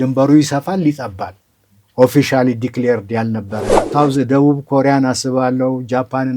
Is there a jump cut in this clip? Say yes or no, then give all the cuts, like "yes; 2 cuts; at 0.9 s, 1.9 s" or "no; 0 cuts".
yes; 1 cut; at 3.8 s